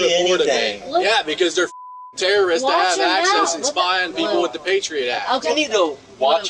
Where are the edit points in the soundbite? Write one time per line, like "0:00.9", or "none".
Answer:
0:01.0
0:05.5